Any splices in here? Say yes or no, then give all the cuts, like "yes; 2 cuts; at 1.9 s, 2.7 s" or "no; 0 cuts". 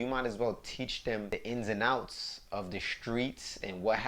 yes; 1 cut; at 1.3 s